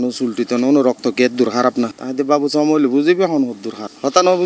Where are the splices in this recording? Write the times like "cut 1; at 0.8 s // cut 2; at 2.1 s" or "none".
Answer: none